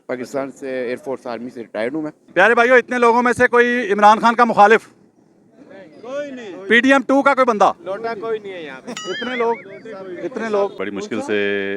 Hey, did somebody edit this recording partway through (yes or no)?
yes